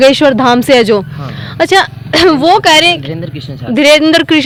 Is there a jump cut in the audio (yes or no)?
no